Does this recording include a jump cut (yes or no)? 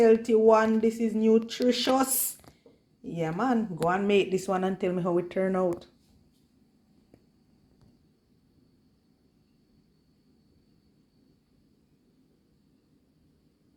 no